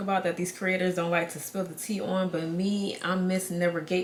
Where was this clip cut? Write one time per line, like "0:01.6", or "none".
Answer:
none